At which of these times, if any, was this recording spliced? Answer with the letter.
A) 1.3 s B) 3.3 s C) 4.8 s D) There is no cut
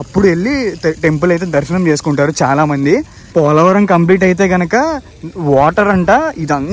B